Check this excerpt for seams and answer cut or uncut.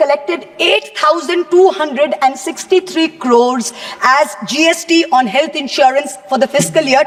uncut